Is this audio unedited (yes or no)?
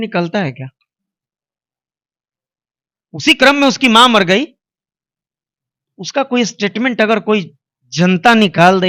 yes